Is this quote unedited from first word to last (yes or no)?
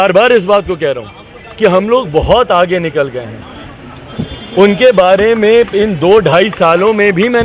yes